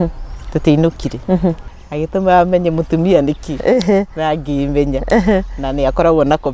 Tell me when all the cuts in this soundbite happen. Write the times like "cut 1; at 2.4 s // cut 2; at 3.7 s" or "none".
cut 1; at 1.7 s